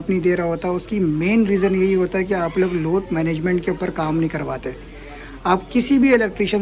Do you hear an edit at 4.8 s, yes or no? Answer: no